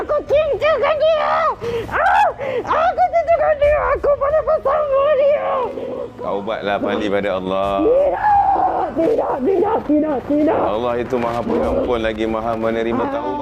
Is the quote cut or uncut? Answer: cut